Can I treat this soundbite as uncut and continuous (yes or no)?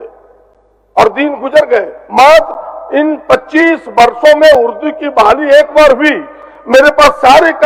yes